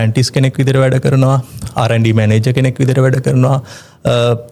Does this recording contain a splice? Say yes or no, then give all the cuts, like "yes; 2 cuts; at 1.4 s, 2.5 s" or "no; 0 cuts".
no; 0 cuts